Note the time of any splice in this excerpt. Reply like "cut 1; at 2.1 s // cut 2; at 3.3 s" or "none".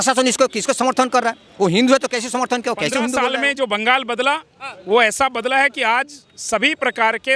cut 1; at 3.2 s